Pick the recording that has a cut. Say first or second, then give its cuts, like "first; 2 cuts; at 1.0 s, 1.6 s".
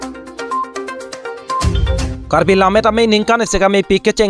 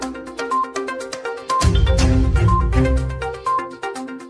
first; 1 cut; at 2.1 s